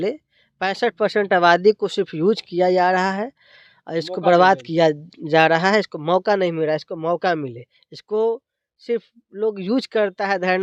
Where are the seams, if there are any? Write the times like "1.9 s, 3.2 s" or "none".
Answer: none